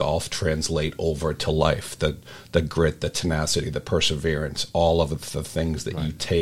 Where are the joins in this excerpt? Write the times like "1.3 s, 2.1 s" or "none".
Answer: none

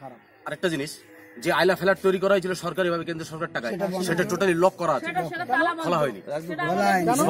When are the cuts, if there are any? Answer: none

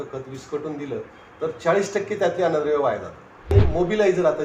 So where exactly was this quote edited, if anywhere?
3.5 s

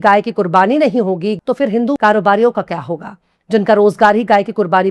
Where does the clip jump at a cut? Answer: 1.4 s

